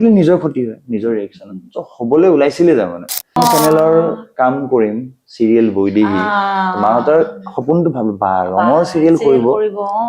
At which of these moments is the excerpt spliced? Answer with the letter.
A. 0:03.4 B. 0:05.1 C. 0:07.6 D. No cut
A